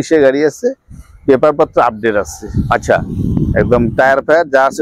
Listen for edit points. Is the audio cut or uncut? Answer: uncut